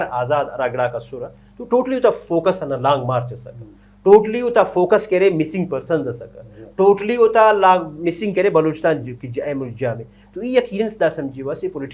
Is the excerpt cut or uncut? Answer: uncut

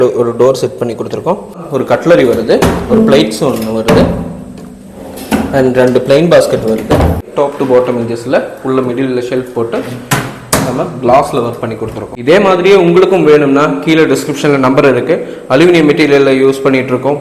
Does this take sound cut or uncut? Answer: cut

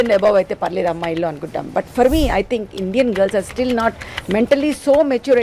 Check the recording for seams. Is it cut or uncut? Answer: uncut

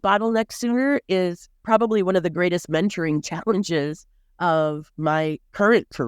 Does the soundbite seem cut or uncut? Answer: cut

